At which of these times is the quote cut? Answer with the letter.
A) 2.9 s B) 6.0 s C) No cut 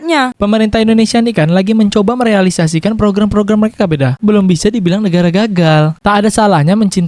B